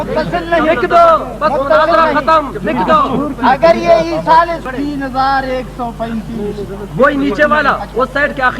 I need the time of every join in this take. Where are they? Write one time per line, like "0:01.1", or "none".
0:04.7